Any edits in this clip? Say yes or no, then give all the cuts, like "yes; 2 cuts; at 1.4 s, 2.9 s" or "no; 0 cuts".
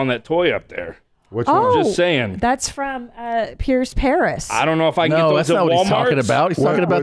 no; 0 cuts